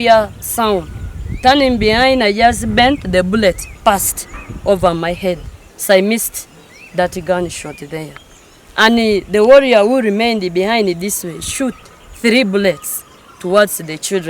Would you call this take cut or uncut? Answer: uncut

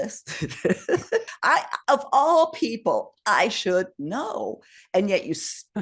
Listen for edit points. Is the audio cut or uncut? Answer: cut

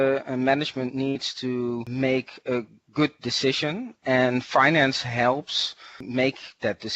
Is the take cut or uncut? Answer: cut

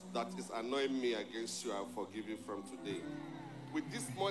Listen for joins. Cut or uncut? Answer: uncut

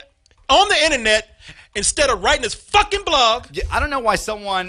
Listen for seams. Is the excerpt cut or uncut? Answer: cut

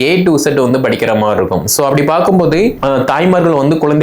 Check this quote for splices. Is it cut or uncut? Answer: cut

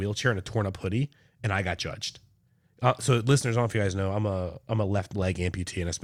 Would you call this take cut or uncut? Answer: uncut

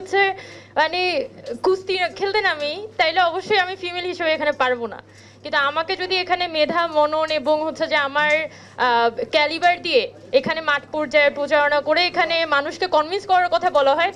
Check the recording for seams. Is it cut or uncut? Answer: uncut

